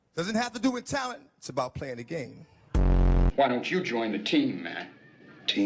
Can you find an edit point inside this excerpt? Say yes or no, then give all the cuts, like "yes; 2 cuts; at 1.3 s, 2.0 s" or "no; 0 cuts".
yes; 1 cut; at 3.0 s